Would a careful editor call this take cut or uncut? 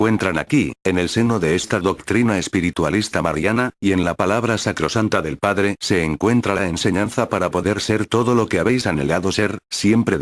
uncut